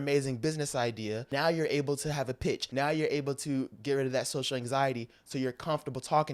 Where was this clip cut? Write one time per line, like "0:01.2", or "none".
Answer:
0:01.3
0:02.6